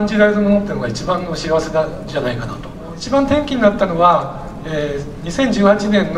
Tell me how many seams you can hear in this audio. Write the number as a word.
one